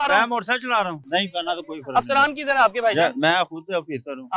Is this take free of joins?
no; 1 cut; at 1.0 s

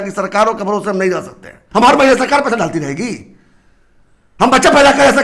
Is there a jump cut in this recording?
yes; 1 cut; at 1.5 s

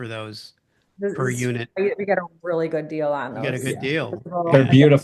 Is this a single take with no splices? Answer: yes; 0 cuts

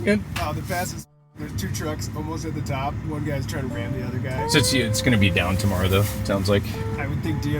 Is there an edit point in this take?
yes; 1 cut; at 4.4 s

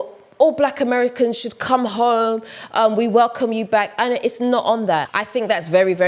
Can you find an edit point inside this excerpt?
yes; 1 cut; at 5.1 s

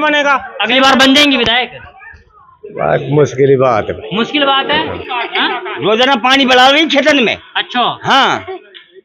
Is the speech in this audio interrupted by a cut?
yes; 1 cut; at 5.0 s

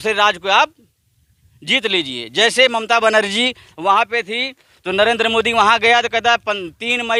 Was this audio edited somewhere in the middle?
no; 0 cuts

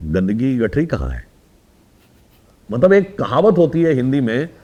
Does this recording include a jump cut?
no; 0 cuts

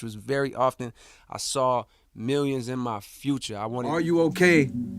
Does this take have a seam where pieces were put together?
yes; 1 cut; at 3.9 s

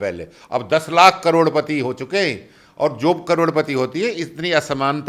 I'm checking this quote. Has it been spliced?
no; 0 cuts

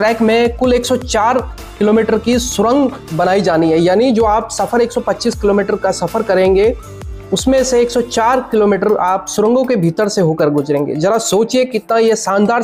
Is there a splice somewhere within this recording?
no; 0 cuts

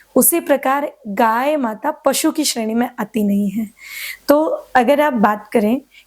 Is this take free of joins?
yes; 0 cuts

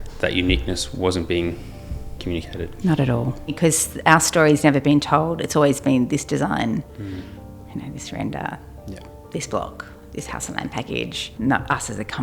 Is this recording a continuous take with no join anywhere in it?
no; 2 cuts; at 3.5 s, 11.2 s

